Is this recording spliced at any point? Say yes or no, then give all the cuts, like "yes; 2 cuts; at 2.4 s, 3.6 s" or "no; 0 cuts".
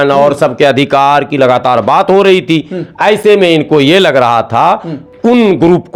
no; 0 cuts